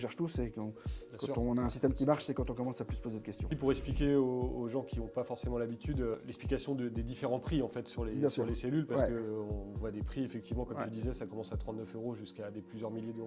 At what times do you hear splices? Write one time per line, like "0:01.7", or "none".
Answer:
0:03.5
0:06.1